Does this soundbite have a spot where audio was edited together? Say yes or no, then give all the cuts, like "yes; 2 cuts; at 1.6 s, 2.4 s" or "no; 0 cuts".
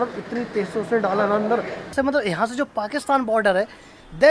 yes; 1 cut; at 1.9 s